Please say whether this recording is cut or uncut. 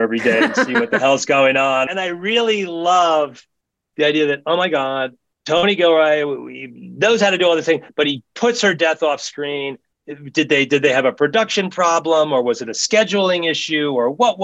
cut